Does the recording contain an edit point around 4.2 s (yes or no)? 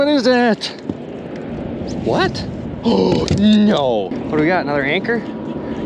yes